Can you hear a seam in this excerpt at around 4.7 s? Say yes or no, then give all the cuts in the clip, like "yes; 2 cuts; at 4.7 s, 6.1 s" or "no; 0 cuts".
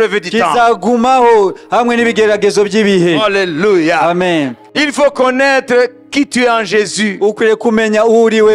yes; 1 cut; at 4.7 s